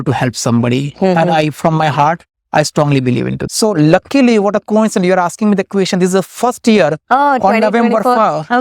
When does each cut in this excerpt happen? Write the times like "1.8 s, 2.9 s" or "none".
3.4 s